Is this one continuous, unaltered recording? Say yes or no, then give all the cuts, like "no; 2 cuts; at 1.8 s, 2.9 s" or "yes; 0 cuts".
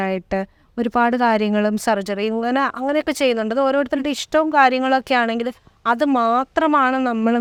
yes; 0 cuts